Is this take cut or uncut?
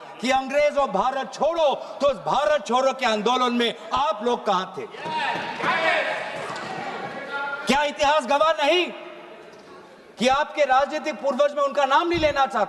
uncut